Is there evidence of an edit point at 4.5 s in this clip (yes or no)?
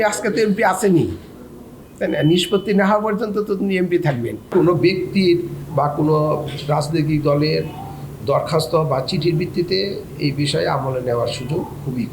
yes